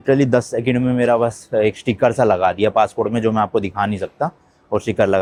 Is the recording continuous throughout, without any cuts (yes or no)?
yes